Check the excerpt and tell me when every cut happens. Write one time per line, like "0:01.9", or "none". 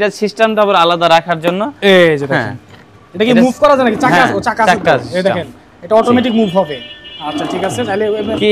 none